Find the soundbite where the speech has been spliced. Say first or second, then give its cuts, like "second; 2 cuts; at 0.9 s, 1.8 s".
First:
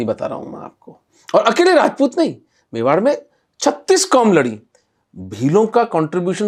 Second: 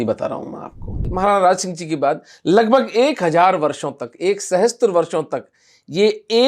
second; 1 cut; at 1.0 s